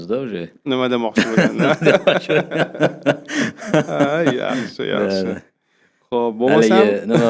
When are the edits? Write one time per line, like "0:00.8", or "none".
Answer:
none